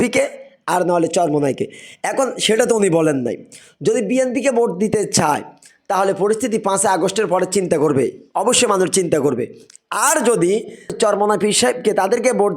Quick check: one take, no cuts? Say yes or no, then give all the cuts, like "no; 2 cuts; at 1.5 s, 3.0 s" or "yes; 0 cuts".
yes; 0 cuts